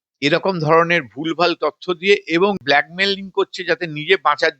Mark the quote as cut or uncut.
cut